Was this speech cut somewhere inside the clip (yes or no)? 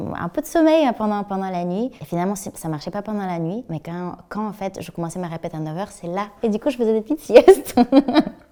no